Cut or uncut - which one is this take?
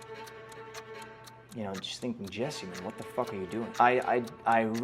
cut